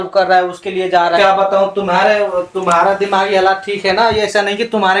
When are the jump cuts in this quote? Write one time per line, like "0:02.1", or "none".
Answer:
0:01.2

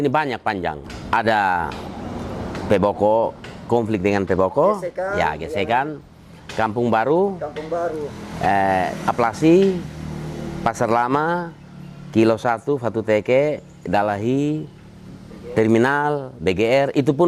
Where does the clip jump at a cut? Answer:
0:00.9

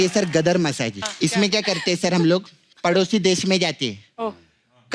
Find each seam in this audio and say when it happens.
0:01.0

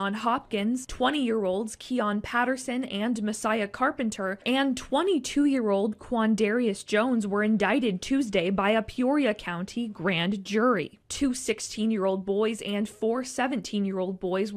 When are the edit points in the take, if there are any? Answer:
none

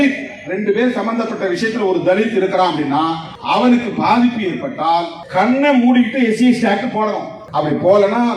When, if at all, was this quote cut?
0:03.3
0:05.2
0:07.3

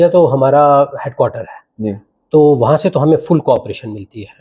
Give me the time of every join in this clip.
none

